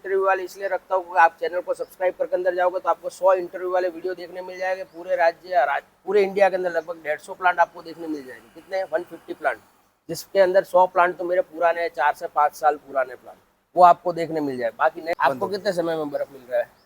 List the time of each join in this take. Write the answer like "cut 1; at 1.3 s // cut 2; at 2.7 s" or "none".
cut 1; at 15.1 s